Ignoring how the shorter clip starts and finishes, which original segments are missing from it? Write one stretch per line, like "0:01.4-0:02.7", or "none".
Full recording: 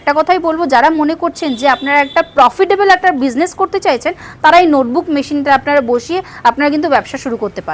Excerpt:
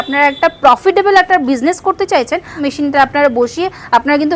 0:04.3-0:05.1